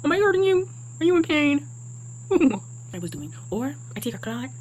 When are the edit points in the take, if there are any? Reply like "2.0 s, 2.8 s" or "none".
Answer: 2.9 s